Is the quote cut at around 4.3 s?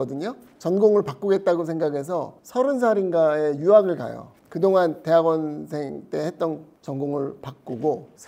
no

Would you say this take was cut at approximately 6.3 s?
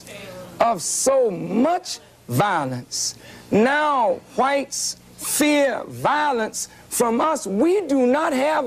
no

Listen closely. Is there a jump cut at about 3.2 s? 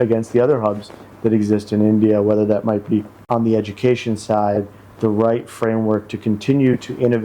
yes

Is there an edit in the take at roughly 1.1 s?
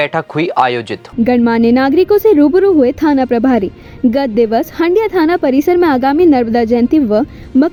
no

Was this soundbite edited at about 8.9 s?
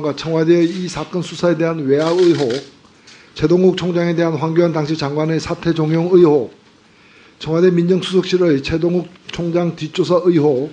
yes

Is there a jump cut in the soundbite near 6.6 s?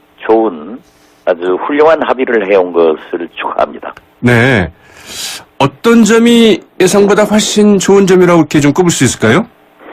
no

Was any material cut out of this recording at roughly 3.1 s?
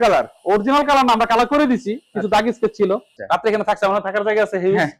yes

